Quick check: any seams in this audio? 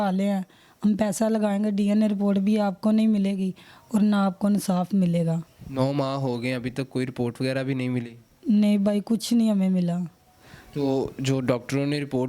no; 0 cuts

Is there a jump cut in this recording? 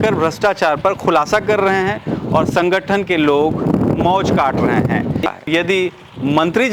yes; 1 cut; at 5.5 s

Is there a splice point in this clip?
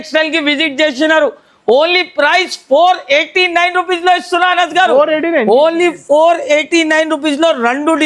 no; 0 cuts

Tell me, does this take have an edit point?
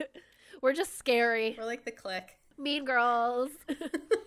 yes; 1 cut; at 2.1 s

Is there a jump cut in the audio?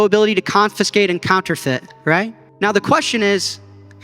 yes; 1 cut; at 2.4 s

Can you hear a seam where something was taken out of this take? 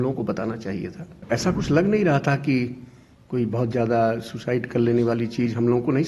yes; 1 cut; at 1.2 s

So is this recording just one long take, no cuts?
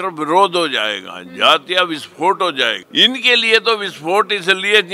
no; 1 cut; at 2.8 s

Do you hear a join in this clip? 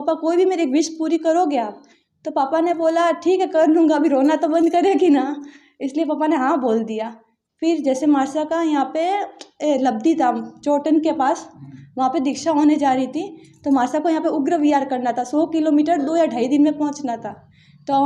no; 0 cuts

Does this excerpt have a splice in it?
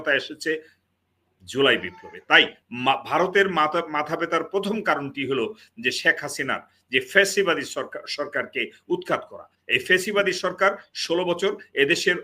yes; 1 cut; at 2.6 s

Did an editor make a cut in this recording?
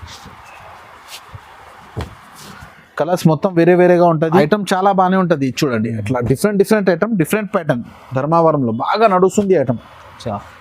yes; 1 cut; at 4.4 s

